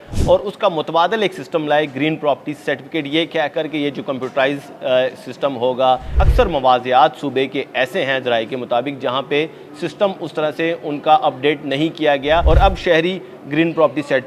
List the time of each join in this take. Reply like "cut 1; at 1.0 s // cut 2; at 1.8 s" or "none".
cut 1; at 6.1 s // cut 2; at 12.4 s

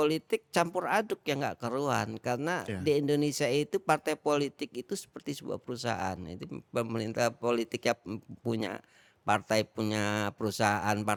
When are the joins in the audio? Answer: none

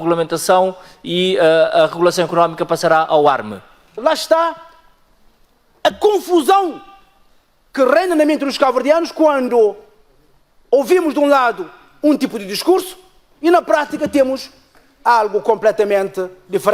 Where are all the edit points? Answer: cut 1; at 3.9 s

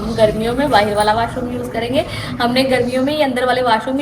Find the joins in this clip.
none

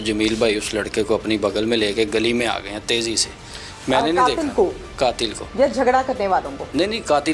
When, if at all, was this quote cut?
none

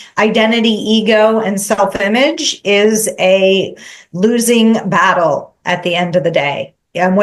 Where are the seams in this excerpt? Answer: none

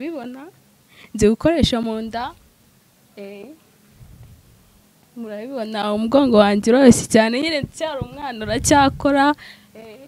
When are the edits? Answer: none

